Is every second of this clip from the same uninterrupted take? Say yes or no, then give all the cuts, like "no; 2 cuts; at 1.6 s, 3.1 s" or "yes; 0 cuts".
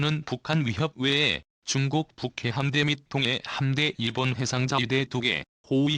no; 1 cut; at 1.5 s